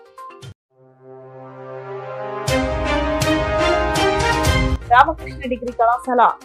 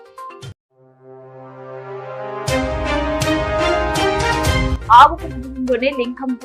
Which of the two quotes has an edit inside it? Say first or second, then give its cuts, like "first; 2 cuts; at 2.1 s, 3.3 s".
first; 1 cut; at 4.7 s